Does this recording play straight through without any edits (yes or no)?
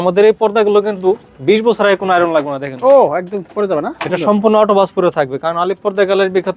yes